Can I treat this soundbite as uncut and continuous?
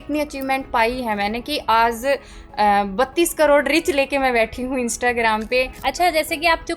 no; 1 cut; at 5.7 s

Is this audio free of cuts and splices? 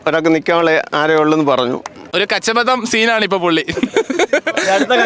no; 1 cut; at 2.0 s

